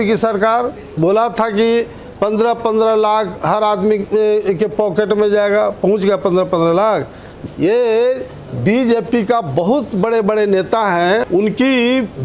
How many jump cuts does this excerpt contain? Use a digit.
3